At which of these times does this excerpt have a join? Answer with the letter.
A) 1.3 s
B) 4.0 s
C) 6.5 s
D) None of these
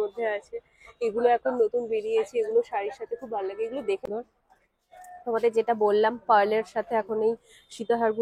B